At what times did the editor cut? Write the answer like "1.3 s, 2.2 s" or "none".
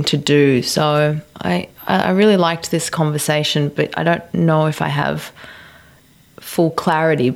none